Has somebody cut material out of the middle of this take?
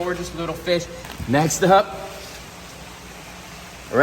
yes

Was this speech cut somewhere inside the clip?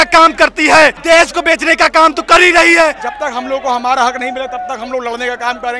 yes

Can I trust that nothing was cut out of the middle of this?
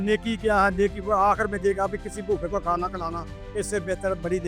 yes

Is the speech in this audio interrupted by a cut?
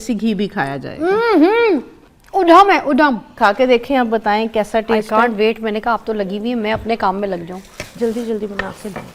yes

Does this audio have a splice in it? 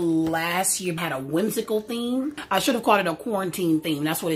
yes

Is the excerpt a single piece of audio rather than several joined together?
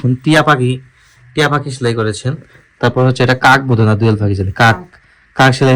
yes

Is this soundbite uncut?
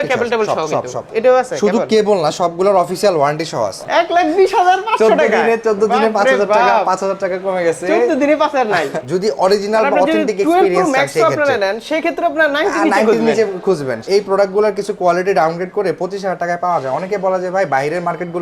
no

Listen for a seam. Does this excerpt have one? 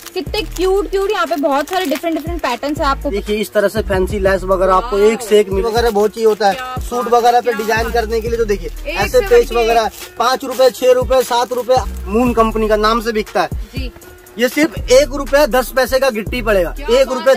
yes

